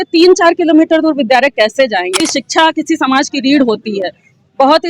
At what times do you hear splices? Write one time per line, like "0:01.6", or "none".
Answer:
0:02.2